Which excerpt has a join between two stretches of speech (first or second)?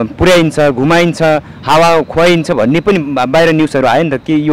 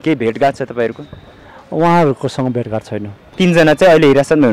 second